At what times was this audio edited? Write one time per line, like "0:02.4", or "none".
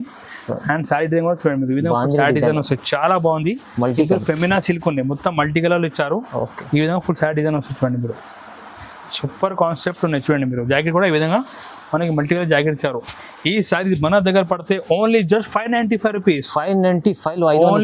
none